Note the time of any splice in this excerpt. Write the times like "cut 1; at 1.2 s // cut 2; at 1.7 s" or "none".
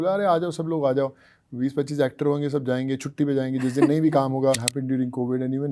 cut 1; at 4.7 s